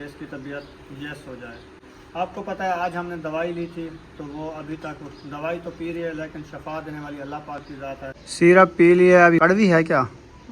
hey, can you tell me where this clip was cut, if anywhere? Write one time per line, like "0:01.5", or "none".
0:08.2
0:09.4